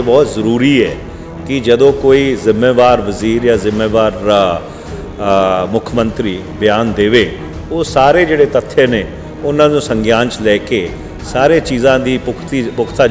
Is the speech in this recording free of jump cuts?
yes; 0 cuts

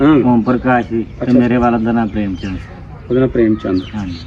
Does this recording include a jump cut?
no; 0 cuts

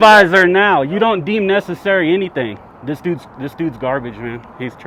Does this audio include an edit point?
no; 0 cuts

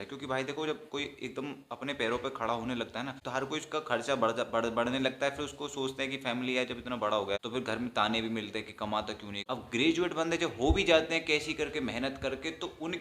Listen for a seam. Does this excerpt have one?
yes; 3 cuts; at 3.2 s, 7.4 s, 9.3 s

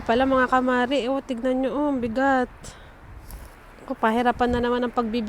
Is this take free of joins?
yes; 0 cuts

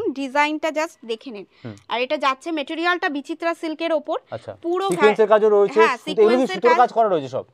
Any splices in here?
no; 0 cuts

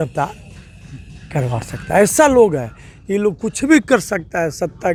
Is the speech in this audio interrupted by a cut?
no; 0 cuts

